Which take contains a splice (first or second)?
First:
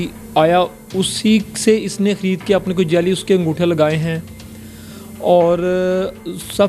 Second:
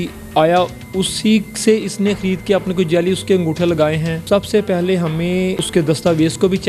second